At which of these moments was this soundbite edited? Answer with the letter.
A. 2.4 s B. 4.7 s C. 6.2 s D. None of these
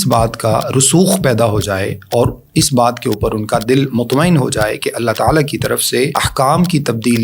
C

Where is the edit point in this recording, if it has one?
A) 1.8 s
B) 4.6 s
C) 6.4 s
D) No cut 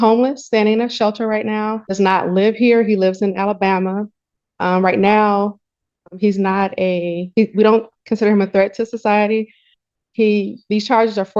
A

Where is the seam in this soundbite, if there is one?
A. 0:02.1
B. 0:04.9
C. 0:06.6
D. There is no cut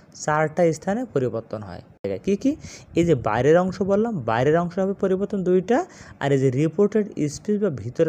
A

